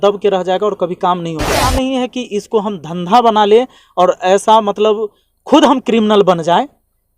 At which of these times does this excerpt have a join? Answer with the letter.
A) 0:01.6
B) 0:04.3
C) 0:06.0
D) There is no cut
A